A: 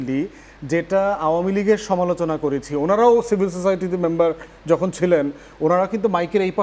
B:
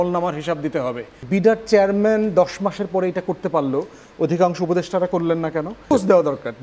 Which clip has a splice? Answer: B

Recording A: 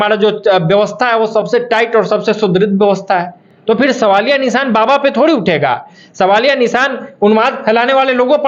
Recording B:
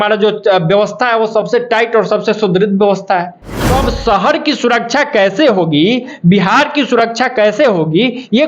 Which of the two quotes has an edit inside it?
B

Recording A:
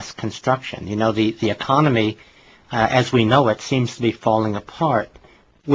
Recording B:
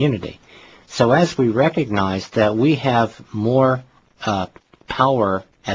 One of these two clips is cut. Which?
A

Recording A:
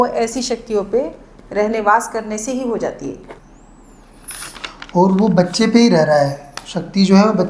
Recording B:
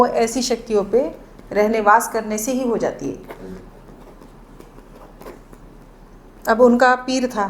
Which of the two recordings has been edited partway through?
A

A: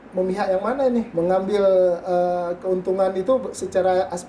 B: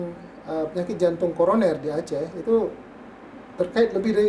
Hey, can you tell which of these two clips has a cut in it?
A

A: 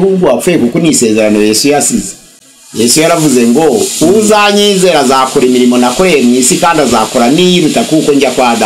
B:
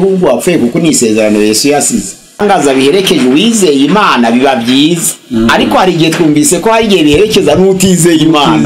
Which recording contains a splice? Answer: B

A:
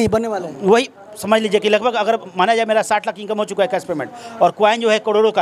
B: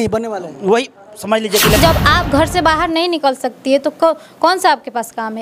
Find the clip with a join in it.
B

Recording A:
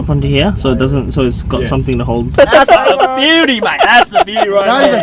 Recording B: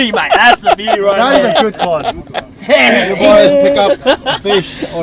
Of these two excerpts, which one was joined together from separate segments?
A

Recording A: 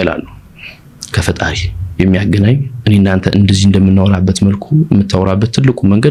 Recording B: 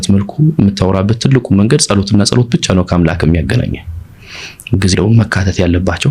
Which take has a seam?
B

